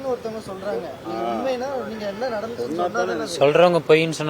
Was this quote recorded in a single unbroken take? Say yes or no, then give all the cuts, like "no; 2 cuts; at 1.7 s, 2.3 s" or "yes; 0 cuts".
yes; 0 cuts